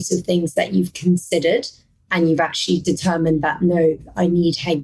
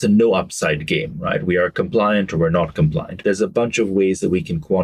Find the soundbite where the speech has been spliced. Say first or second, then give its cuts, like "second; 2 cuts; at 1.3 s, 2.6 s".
second; 1 cut; at 3.2 s